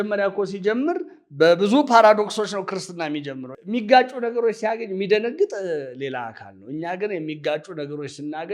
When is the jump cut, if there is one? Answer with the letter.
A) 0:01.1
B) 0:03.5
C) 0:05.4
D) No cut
B